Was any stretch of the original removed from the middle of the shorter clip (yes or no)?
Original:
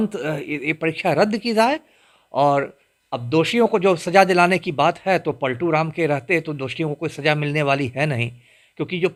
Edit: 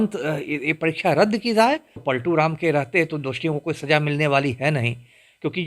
yes